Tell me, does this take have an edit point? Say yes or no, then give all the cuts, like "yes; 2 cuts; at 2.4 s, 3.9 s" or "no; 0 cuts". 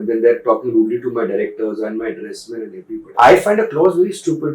yes; 1 cut; at 3.1 s